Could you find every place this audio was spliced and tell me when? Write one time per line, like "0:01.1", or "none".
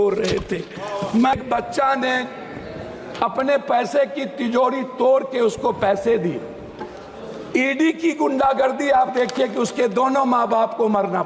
0:01.3